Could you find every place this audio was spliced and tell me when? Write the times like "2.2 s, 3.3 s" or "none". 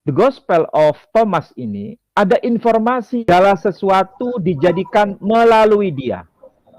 3.2 s